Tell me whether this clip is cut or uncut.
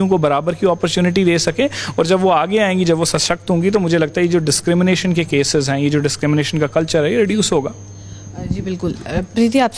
uncut